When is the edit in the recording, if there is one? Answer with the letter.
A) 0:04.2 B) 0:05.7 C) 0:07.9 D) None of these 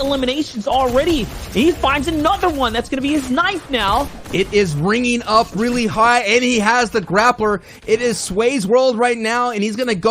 A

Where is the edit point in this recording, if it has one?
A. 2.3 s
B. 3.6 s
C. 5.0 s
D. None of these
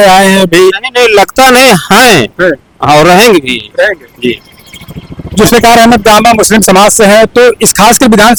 D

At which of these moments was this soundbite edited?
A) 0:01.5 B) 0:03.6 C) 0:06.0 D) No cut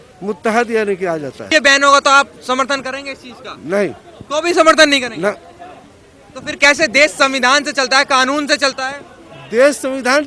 A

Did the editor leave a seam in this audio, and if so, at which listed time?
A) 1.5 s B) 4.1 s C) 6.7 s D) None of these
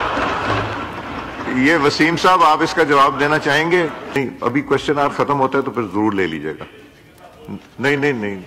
B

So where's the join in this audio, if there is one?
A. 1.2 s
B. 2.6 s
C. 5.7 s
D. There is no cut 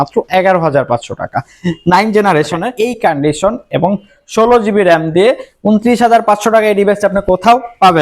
B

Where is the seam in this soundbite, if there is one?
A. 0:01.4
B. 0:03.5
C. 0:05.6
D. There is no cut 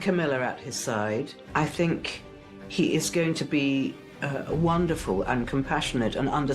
A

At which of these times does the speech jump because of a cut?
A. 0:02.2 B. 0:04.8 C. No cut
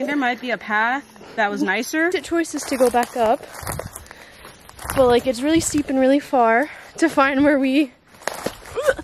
A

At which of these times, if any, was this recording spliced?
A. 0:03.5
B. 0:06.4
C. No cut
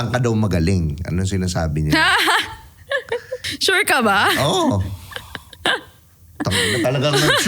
A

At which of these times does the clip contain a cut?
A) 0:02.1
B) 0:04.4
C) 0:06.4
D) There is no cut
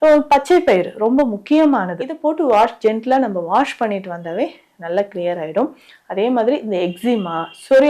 A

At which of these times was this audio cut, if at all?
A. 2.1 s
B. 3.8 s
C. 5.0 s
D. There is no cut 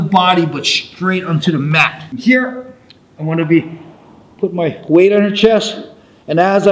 A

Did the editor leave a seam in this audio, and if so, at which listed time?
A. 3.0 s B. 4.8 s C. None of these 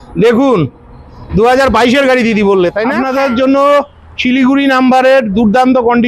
A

